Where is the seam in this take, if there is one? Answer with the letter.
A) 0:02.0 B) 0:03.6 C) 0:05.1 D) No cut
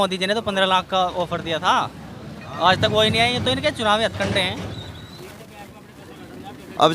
C